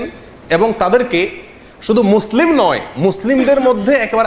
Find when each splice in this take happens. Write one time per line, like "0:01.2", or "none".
none